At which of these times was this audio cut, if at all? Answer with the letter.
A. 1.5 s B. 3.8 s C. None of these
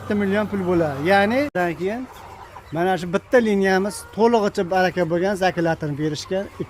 A